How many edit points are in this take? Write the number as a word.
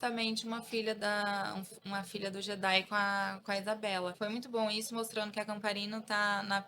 one